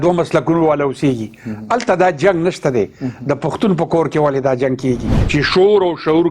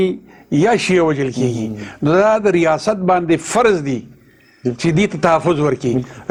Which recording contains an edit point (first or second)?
first